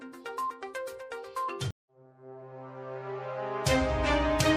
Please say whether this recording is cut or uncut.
uncut